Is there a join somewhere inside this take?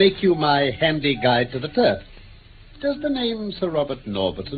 yes; 1 cut; at 0.9 s

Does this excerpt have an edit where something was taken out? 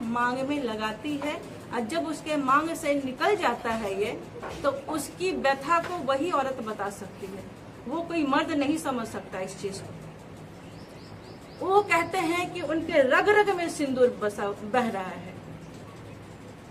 no; 0 cuts

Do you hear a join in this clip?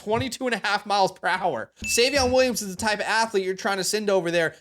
yes; 1 cut; at 1.8 s

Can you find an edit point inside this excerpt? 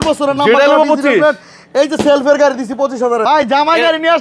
yes; 1 cut; at 3.2 s

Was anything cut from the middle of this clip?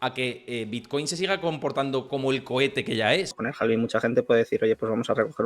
yes; 1 cut; at 3.4 s

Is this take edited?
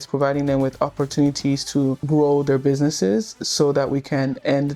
yes; 1 cut; at 2.0 s

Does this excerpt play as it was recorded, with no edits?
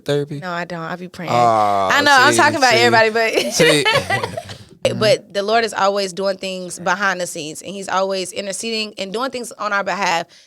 no; 1 cut; at 4.8 s

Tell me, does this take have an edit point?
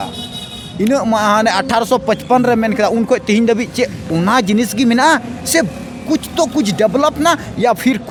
no; 0 cuts

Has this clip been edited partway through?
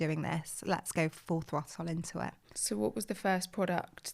no; 0 cuts

